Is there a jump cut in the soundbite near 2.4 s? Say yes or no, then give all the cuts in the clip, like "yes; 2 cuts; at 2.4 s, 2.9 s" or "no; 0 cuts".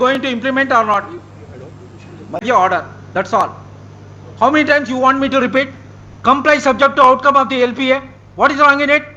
yes; 1 cut; at 2.4 s